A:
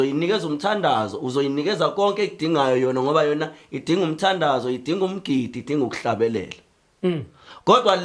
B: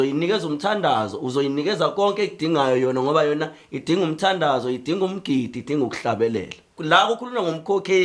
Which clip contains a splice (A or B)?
B